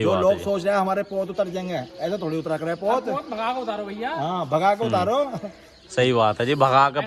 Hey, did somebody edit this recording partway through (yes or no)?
no